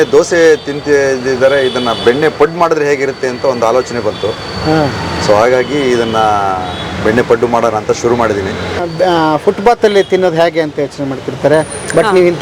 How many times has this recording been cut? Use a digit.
1